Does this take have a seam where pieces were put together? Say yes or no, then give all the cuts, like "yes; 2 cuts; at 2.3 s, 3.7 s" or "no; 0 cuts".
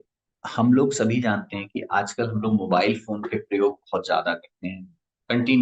no; 0 cuts